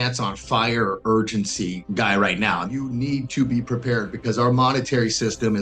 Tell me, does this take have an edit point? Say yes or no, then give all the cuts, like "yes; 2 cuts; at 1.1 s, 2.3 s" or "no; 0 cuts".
yes; 2 cuts; at 1.8 s, 2.7 s